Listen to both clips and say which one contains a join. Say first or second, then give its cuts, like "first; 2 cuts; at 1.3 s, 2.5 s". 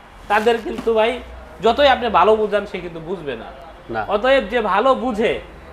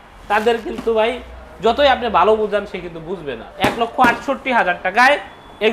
second; 1 cut; at 3.5 s